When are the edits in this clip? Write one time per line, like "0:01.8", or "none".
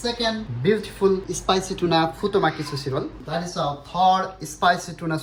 none